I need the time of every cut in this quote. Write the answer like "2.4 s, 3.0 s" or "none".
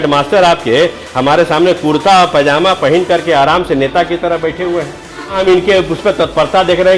5.4 s